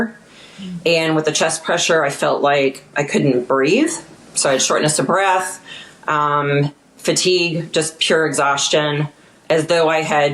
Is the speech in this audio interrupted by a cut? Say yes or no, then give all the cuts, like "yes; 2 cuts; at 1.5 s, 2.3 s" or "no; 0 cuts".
no; 0 cuts